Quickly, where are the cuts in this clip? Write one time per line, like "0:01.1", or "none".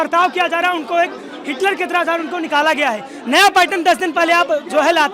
none